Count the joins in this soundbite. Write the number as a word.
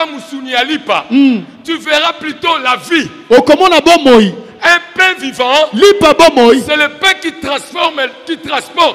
zero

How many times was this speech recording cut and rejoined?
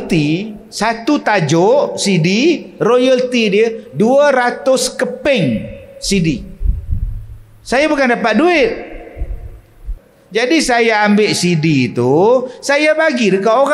one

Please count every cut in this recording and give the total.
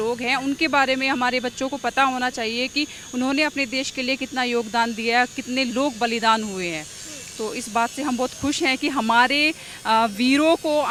zero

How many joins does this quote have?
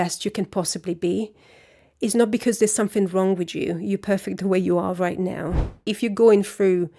one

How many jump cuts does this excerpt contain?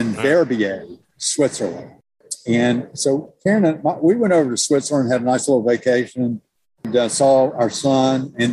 two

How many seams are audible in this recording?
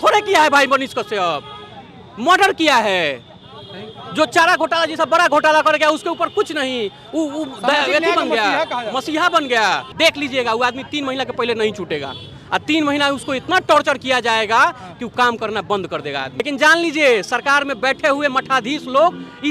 two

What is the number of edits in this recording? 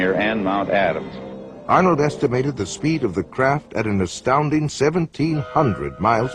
one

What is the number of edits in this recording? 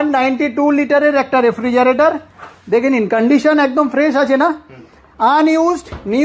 zero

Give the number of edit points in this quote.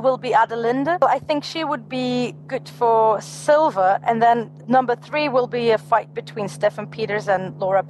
two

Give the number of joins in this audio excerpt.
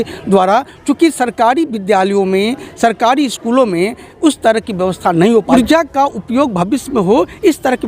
one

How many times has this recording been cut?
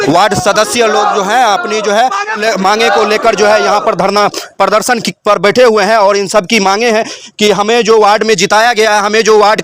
one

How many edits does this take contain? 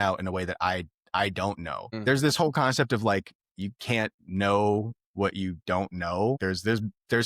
two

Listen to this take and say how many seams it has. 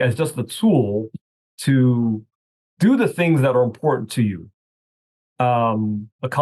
zero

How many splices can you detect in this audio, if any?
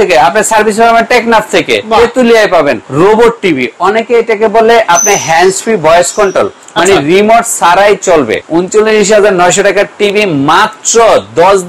two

